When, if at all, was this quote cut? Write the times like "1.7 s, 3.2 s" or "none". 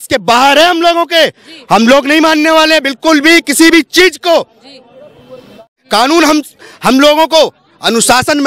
5.8 s